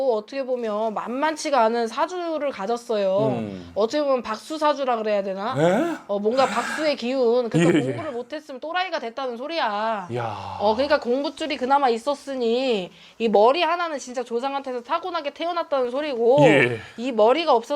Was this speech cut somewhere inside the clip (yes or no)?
no